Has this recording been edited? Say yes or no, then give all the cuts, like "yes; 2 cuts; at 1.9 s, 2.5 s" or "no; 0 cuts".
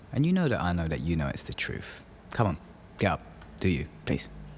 no; 0 cuts